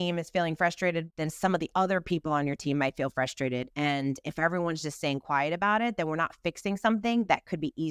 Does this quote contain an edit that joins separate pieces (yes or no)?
yes